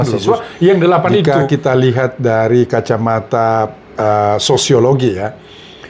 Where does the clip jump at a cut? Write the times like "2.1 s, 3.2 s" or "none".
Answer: 1.2 s